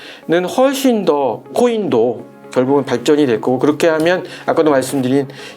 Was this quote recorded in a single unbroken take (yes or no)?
no